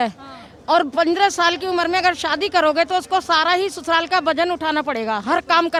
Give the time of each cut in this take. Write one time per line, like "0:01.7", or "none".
none